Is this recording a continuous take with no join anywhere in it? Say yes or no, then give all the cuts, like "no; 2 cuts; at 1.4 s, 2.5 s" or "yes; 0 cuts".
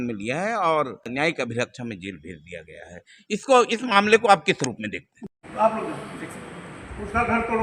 no; 2 cuts; at 1.1 s, 5.1 s